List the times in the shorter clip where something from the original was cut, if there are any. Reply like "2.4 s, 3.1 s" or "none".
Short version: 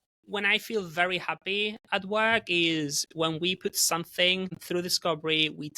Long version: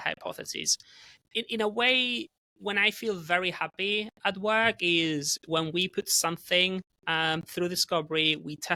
4.6 s